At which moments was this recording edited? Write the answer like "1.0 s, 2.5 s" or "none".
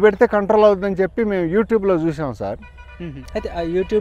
none